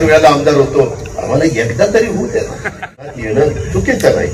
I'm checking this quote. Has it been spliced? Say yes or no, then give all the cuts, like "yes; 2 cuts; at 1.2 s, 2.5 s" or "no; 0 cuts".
yes; 1 cut; at 3.0 s